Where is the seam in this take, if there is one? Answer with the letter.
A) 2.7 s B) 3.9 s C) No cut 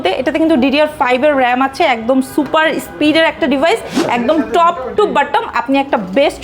B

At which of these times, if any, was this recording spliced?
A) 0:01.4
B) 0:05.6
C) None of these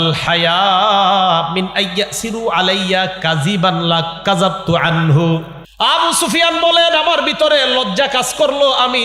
B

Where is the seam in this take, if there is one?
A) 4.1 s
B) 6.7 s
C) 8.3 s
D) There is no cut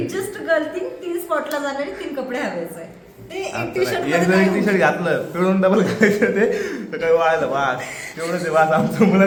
D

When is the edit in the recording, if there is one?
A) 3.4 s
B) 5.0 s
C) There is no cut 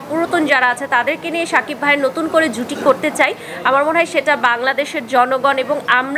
C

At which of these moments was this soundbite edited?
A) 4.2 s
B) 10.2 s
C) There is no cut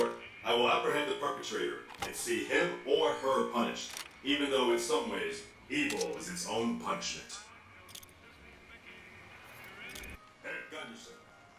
B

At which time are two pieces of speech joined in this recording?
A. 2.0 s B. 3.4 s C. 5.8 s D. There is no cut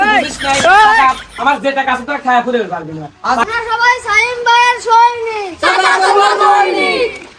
B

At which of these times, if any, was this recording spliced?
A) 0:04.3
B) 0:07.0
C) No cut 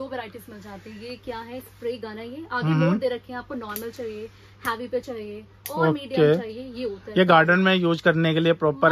C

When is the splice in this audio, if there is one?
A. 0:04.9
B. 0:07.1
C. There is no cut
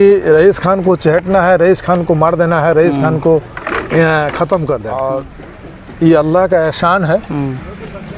A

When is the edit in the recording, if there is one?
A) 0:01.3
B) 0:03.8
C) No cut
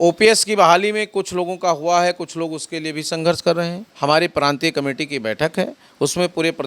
B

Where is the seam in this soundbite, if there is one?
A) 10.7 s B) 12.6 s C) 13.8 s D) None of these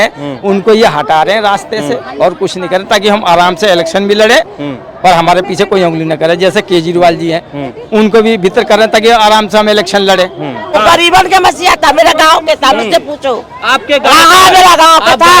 A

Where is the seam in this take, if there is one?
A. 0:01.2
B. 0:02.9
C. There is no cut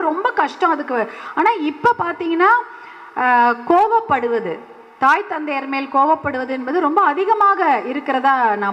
A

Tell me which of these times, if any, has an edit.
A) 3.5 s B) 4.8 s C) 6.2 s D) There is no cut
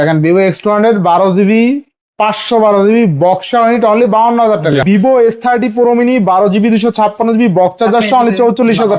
B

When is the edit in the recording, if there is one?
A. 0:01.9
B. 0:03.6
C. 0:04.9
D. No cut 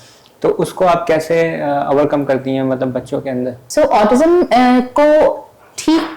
B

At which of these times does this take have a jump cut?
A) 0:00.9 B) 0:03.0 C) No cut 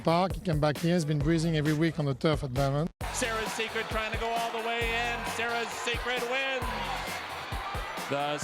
B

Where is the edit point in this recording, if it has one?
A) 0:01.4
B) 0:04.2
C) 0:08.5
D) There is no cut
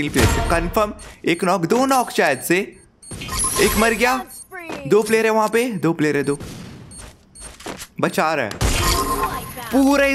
C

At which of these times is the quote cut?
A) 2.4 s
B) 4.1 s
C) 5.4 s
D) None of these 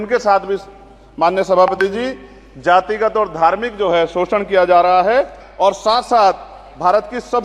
C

